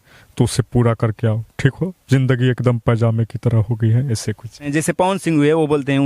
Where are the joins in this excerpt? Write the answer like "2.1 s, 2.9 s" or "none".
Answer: 4.7 s